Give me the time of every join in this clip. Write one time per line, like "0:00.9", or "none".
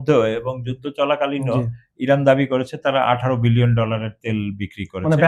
none